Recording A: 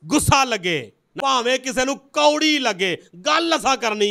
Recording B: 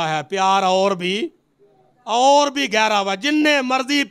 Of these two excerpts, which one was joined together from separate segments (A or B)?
A